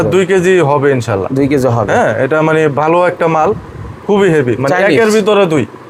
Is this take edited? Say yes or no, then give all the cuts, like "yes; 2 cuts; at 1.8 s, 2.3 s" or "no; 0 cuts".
no; 0 cuts